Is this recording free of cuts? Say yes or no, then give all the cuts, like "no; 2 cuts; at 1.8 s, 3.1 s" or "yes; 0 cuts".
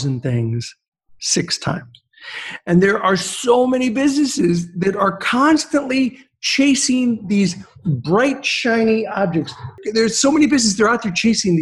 no; 1 cut; at 9.7 s